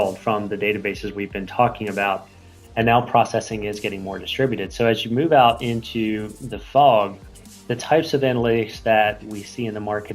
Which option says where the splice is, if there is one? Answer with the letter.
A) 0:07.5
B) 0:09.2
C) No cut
B